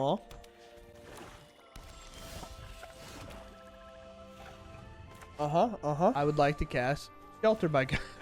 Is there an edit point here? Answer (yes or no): yes